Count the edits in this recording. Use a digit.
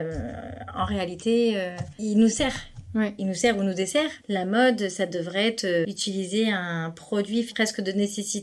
4